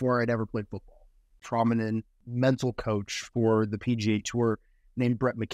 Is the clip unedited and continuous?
no; 2 cuts; at 1.4 s, 2.2 s

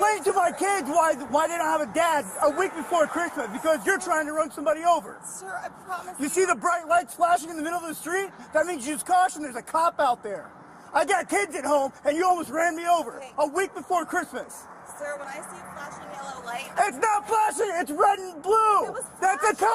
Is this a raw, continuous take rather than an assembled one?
yes; 0 cuts

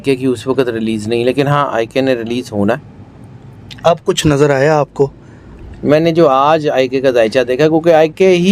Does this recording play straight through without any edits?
yes; 0 cuts

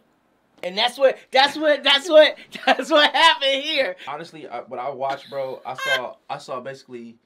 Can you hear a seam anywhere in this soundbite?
yes; 1 cut; at 4.1 s

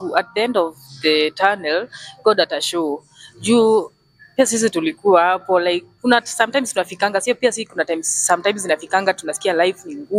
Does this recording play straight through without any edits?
yes; 0 cuts

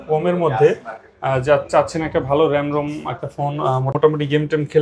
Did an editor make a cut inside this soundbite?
yes; 1 cut; at 3.9 s

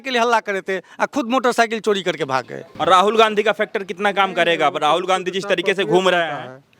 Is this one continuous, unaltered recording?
no; 1 cut; at 2.6 s

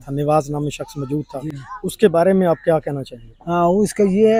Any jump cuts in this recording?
no; 0 cuts

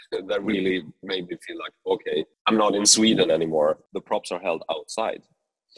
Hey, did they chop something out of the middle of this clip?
yes; 2 cuts; at 2.3 s, 3.9 s

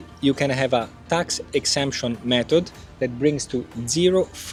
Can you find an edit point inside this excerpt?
no; 0 cuts

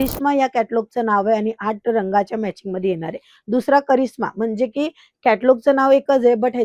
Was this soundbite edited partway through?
no; 0 cuts

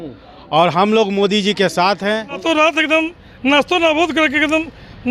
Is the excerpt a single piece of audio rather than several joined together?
no; 1 cut; at 2.4 s

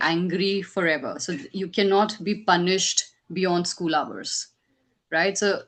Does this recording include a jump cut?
no; 0 cuts

